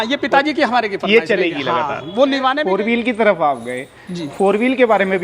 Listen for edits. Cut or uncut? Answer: cut